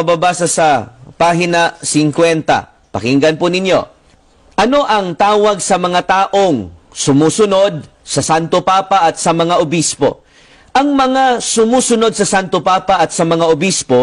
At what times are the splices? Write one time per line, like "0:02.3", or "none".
none